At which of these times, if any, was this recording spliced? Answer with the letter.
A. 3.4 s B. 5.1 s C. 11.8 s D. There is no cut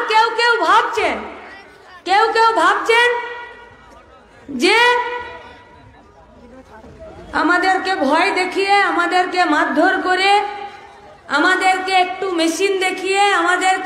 C